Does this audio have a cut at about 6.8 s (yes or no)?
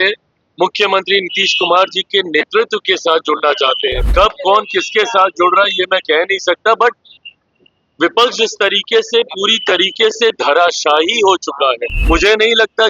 no